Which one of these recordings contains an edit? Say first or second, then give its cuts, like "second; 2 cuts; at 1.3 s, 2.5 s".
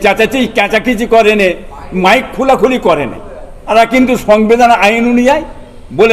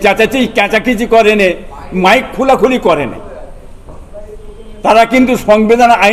first; 1 cut; at 3.7 s